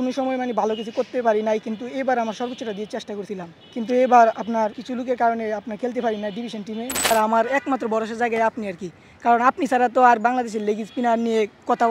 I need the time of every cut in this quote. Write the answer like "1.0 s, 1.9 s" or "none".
3.6 s, 4.8 s, 7.1 s